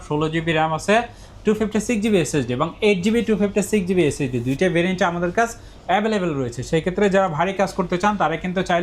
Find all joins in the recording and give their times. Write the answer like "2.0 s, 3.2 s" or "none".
none